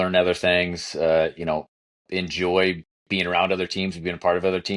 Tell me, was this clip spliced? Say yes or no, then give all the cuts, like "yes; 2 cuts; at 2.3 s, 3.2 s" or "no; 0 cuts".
no; 0 cuts